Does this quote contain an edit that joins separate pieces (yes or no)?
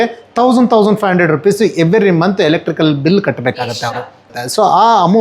yes